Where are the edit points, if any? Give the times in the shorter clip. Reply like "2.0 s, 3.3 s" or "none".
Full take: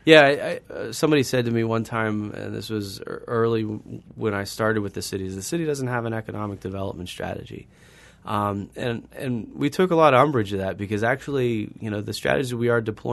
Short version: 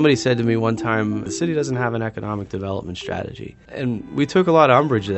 1.3 s, 3.7 s